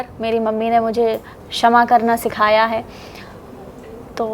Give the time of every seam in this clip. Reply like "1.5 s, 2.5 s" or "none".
none